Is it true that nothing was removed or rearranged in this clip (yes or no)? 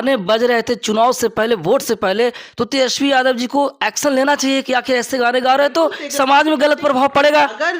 yes